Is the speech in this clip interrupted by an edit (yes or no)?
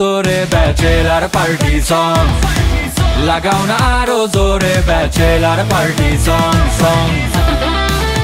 no